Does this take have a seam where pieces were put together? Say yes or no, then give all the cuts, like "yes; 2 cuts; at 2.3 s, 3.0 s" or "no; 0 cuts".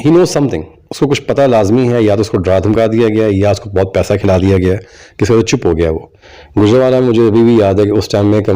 yes; 1 cut; at 6.2 s